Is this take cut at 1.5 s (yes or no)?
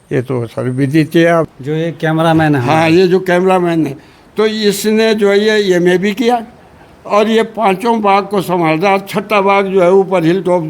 yes